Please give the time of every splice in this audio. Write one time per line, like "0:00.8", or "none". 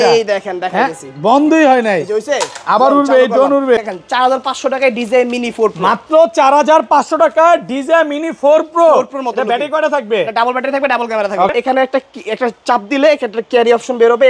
0:03.8
0:11.5